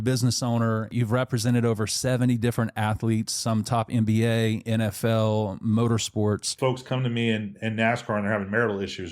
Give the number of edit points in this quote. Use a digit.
2